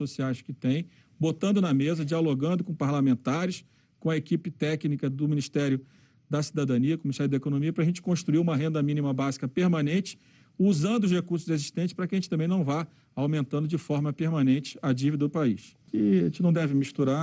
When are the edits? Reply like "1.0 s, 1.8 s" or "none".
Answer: none